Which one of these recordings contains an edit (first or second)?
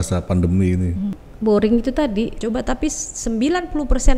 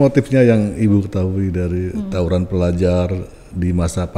first